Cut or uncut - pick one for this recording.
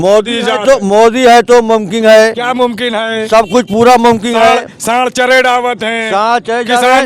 uncut